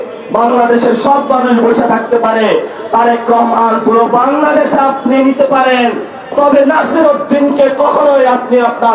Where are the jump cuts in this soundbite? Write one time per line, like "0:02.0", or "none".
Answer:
none